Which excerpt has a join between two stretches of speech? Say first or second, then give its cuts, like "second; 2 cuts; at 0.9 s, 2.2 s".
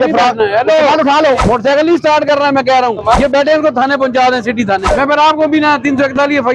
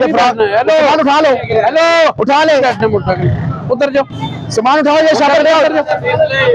first; 3 cuts; at 1.4 s, 3.2 s, 4.9 s